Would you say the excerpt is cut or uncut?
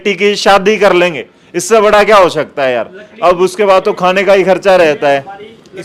uncut